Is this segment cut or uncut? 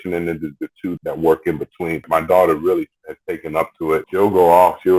cut